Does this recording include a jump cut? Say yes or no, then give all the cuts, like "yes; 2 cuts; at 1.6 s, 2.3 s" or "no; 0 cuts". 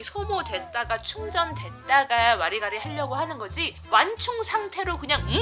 no; 0 cuts